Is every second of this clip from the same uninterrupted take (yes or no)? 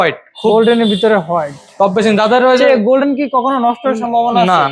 yes